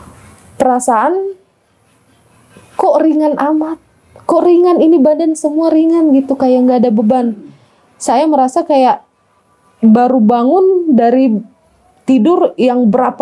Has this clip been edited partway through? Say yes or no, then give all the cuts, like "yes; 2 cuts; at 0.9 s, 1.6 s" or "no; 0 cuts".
no; 0 cuts